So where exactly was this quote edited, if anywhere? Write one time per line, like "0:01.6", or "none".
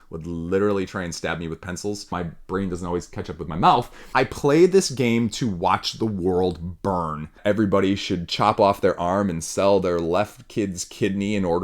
0:02.1
0:04.0
0:07.4